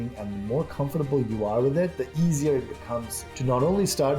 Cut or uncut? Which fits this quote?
cut